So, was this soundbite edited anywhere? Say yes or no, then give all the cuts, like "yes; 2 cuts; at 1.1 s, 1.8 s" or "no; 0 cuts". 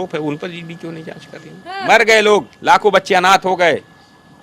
yes; 1 cut; at 1.7 s